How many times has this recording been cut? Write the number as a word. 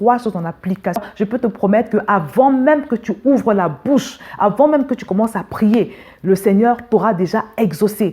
one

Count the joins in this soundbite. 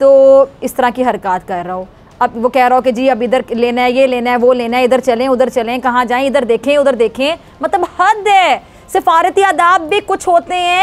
zero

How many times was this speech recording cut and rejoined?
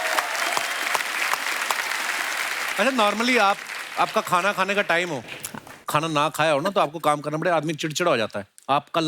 one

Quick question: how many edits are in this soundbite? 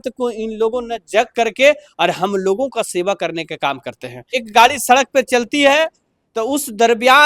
one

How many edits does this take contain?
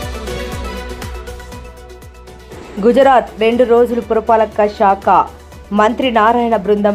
one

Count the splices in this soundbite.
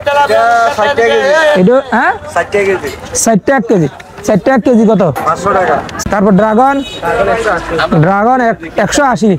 one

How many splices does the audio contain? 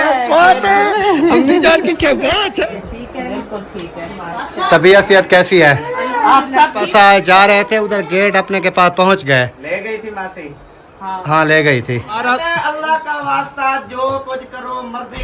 three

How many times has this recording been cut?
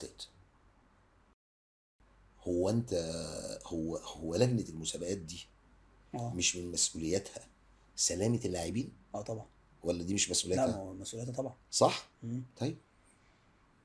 one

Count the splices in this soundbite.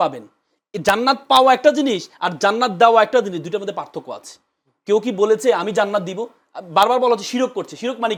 zero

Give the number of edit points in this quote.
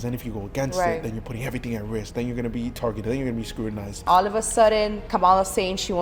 two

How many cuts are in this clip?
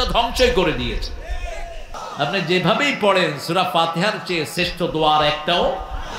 one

